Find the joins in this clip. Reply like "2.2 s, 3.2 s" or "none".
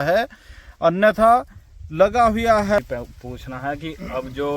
2.8 s